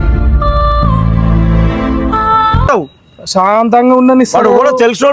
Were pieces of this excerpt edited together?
yes; 1 cut; at 2.7 s

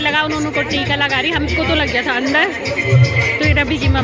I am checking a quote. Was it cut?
no; 0 cuts

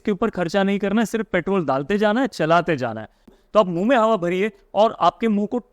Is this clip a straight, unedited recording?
no; 1 cut; at 3.3 s

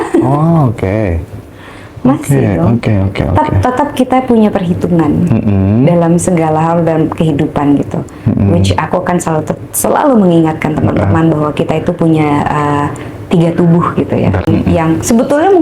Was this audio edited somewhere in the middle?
yes; 1 cut; at 14.4 s

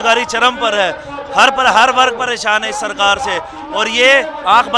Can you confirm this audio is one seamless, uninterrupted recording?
yes; 0 cuts

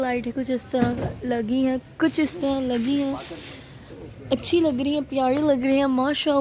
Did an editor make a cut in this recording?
no; 0 cuts

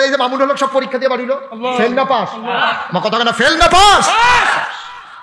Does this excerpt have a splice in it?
no; 0 cuts

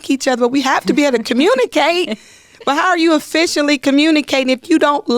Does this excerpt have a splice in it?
no; 0 cuts

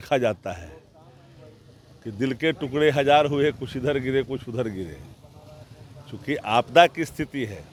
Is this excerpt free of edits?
yes; 0 cuts

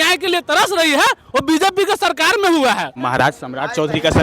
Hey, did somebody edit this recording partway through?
yes; 1 cut; at 2.9 s

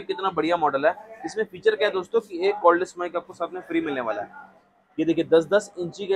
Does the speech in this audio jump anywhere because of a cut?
no; 0 cuts

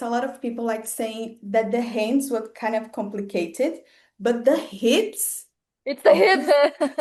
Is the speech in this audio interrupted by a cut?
no; 0 cuts

